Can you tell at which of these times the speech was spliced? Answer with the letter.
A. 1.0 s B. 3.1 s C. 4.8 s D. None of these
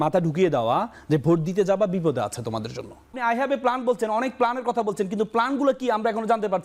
B